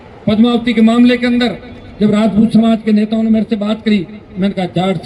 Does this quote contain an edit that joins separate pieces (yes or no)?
no